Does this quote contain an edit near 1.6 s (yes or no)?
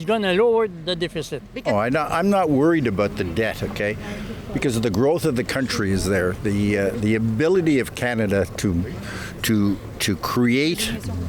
no